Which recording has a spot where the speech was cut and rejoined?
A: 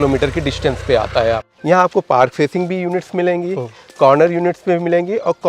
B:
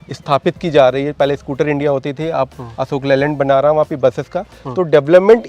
A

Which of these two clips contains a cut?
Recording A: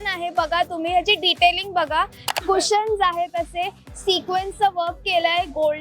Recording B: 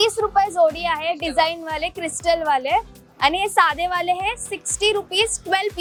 A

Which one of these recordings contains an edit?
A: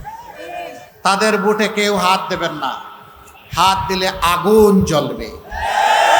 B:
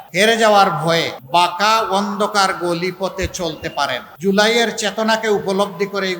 B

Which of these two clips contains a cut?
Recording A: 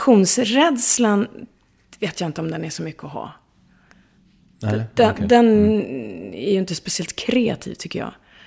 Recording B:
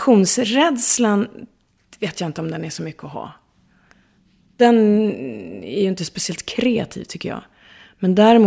B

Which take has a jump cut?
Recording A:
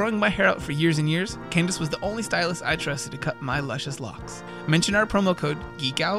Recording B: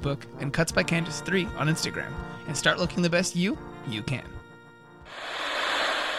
B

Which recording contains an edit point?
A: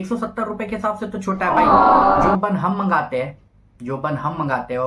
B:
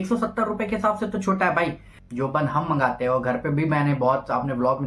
B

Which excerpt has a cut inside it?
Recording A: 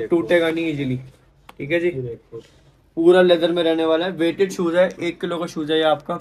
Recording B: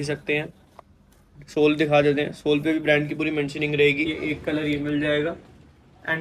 B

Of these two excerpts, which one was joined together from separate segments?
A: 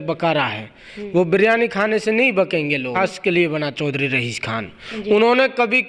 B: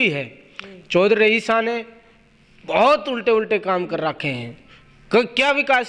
A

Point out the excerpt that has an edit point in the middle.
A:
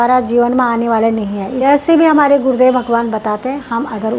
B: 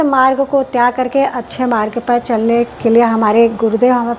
A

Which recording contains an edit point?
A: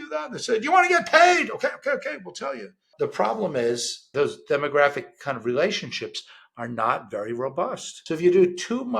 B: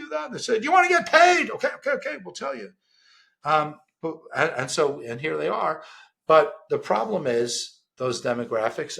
A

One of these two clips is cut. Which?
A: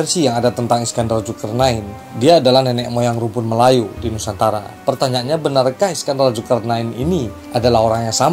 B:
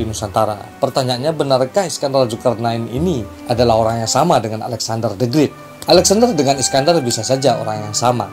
B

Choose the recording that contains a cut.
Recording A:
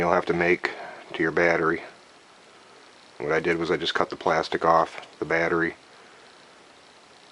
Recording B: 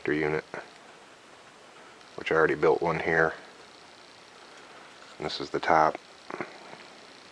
B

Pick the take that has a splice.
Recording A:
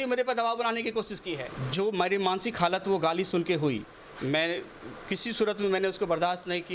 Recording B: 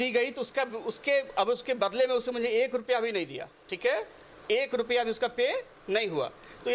A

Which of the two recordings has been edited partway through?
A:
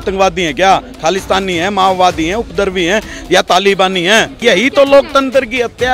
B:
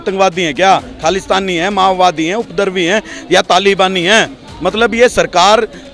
A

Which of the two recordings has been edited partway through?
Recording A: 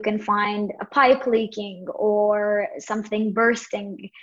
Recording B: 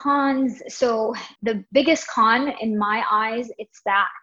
B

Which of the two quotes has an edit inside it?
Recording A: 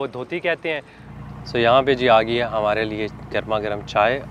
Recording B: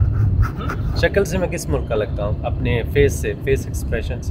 A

